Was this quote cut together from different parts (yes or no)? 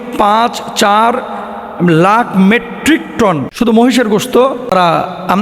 yes